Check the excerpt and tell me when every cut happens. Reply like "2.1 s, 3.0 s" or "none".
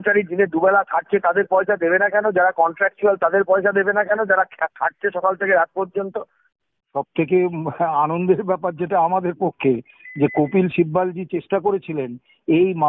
6.9 s